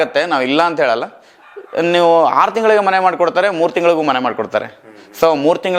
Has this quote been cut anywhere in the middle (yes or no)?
no